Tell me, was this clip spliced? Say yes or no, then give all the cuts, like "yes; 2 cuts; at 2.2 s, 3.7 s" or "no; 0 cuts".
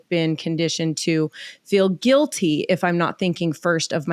no; 0 cuts